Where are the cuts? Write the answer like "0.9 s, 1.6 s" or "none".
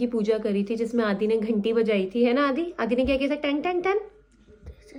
none